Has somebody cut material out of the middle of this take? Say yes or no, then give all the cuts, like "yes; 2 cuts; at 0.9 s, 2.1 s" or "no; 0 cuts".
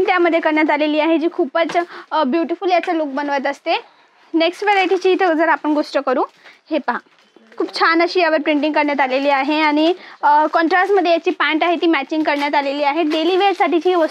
no; 0 cuts